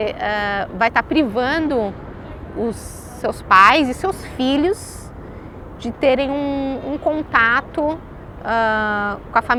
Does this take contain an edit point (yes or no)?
no